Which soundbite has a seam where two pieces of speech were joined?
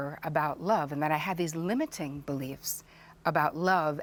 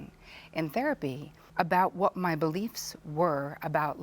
second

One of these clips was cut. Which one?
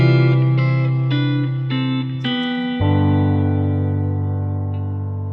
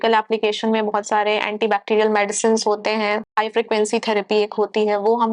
second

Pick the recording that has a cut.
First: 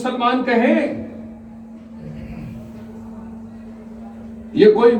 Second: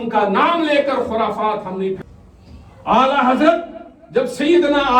second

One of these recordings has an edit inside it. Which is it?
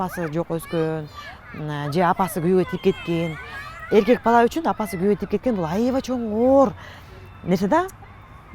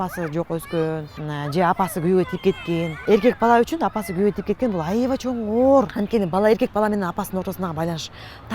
second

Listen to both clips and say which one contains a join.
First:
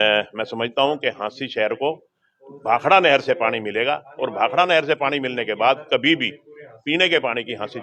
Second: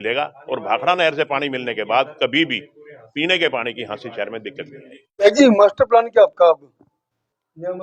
second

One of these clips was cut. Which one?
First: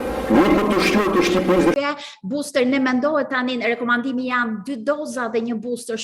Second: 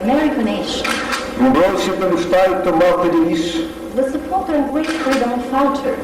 first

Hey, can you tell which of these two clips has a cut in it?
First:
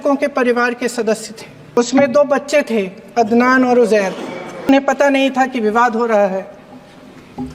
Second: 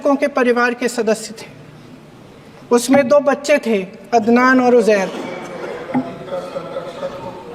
first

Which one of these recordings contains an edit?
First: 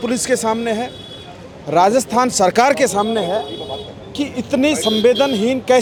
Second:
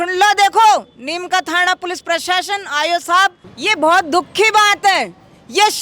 second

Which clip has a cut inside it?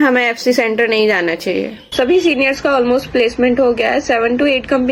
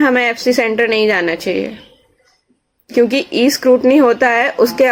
first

